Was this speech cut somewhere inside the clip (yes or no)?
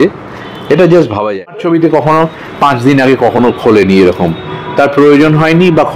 yes